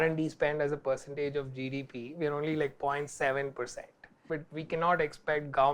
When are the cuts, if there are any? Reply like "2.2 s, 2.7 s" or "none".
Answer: none